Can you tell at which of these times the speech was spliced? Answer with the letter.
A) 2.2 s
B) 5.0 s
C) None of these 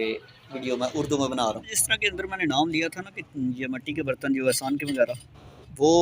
A